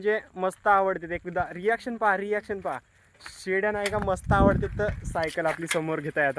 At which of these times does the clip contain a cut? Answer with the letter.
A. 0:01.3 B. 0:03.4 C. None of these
C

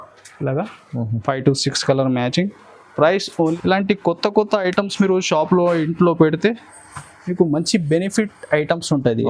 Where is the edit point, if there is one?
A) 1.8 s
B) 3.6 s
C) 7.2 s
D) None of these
B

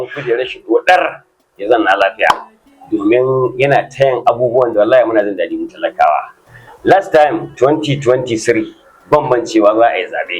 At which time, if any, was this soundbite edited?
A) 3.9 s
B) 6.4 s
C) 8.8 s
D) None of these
B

